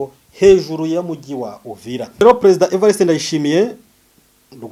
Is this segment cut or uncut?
cut